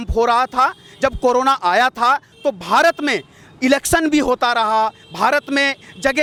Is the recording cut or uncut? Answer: uncut